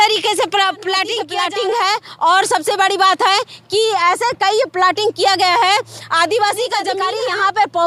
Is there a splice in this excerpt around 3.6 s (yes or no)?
no